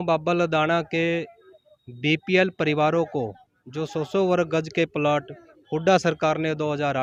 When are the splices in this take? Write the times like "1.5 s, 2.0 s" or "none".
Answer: none